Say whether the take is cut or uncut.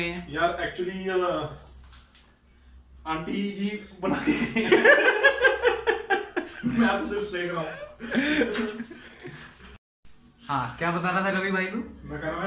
uncut